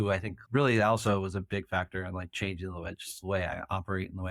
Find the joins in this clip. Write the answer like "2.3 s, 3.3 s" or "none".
none